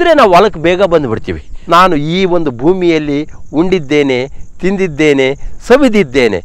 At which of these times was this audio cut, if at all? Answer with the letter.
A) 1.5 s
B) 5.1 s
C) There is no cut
A